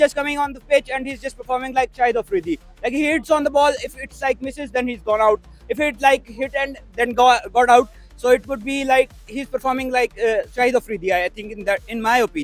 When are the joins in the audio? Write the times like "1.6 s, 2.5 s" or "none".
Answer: none